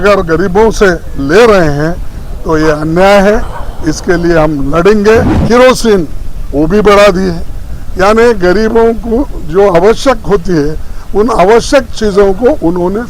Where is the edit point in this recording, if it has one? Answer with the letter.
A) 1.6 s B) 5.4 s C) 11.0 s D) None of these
B